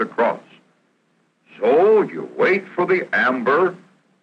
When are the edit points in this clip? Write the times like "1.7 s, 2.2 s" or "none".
1.9 s